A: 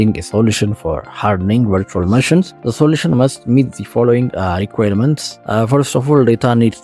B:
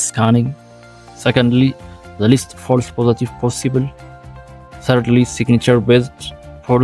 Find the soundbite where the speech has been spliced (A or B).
A